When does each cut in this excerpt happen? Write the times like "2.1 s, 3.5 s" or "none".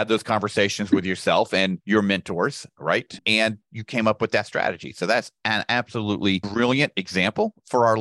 1.8 s, 6.5 s